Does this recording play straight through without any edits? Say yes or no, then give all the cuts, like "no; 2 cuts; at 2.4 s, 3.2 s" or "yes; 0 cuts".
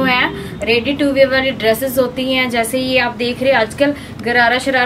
yes; 0 cuts